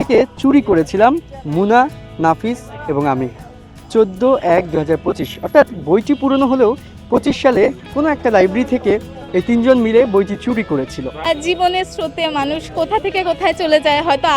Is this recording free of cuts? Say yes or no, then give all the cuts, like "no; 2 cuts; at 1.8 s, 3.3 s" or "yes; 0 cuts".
no; 1 cut; at 11.3 s